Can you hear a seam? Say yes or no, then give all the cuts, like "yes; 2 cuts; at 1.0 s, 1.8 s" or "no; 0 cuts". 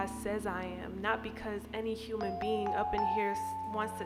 no; 0 cuts